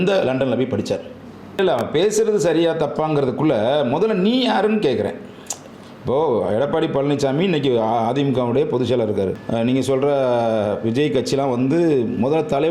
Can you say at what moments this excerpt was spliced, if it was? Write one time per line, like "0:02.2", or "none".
0:01.6
0:09.4